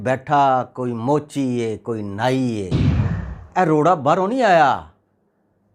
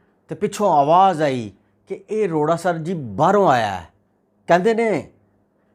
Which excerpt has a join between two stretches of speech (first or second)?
second